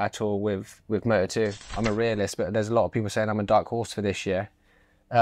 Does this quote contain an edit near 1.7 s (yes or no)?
yes